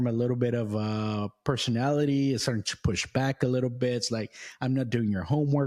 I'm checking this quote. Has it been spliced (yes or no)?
no